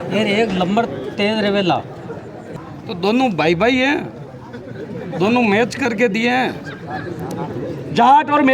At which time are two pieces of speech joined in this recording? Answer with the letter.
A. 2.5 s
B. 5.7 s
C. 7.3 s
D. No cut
A